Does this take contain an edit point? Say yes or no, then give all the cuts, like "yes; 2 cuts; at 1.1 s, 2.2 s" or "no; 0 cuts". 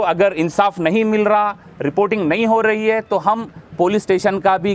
no; 0 cuts